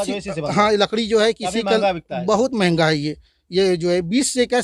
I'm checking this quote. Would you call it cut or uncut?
uncut